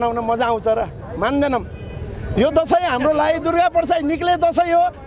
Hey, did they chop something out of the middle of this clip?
no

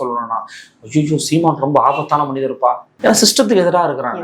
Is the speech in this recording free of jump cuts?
no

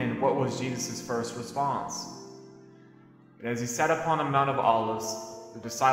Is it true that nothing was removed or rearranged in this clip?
yes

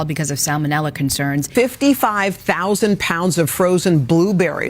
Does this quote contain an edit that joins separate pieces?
yes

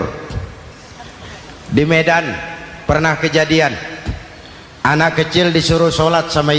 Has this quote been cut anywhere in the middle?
no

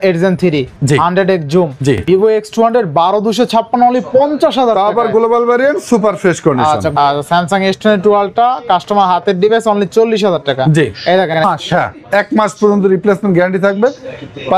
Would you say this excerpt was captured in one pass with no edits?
no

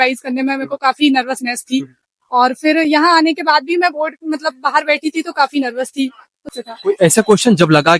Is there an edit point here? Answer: yes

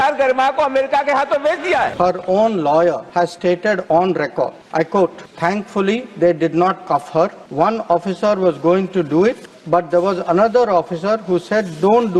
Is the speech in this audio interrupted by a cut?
yes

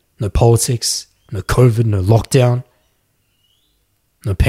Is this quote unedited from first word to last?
yes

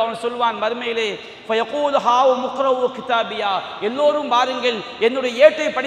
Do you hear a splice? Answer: no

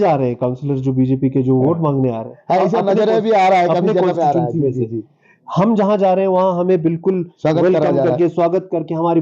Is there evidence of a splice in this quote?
no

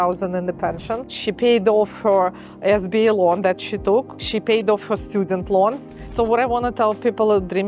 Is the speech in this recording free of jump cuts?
no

